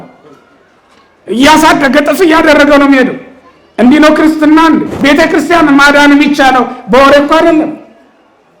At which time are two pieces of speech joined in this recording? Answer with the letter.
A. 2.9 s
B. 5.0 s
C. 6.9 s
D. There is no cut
B